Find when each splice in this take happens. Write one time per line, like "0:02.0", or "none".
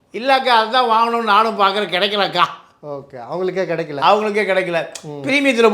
none